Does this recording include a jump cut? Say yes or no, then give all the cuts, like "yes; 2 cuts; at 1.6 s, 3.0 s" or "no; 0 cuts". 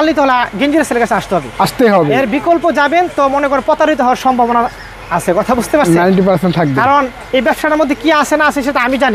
no; 0 cuts